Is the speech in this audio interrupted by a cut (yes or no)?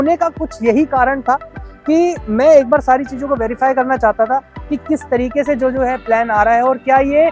no